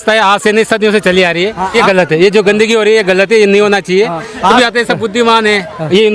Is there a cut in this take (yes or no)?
yes